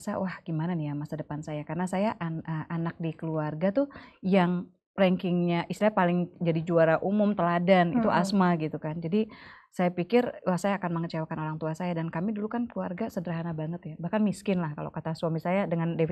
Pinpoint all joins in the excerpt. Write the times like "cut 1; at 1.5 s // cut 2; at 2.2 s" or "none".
none